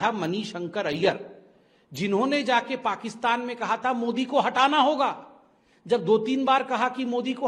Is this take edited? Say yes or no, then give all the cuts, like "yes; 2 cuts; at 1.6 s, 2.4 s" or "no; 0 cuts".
no; 0 cuts